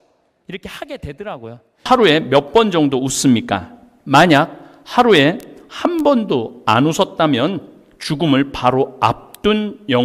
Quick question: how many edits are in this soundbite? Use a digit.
1